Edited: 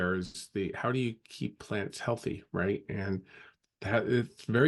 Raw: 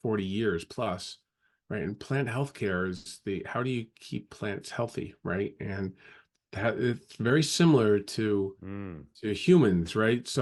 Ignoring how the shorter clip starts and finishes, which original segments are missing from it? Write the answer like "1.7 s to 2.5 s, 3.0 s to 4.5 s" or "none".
none